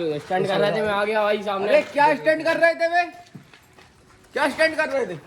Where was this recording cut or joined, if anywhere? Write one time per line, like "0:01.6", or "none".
none